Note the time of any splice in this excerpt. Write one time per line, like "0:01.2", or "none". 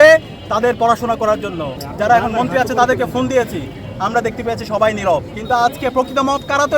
0:01.8
0:05.3